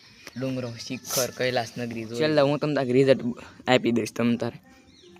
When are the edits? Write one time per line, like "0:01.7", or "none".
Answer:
0:02.1